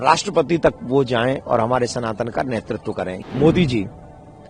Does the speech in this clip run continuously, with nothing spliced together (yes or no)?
no